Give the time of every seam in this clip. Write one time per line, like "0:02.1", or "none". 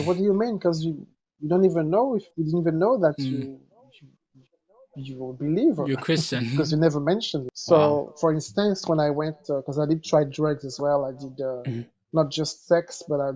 0:07.5